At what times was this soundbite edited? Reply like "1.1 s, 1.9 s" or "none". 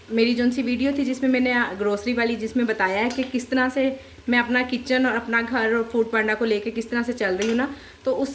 none